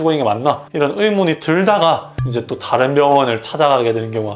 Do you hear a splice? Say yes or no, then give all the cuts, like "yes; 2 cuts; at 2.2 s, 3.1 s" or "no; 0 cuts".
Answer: no; 0 cuts